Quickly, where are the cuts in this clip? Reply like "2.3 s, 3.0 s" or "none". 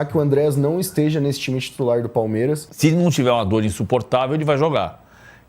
2.7 s